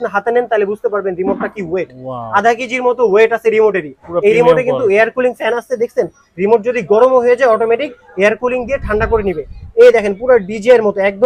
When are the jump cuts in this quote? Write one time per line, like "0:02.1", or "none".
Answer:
none